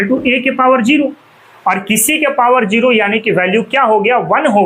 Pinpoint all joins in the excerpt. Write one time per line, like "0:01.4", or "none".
none